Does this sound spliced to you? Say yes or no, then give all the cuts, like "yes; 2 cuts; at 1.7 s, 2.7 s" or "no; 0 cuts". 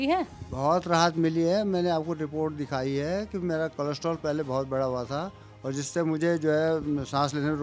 no; 0 cuts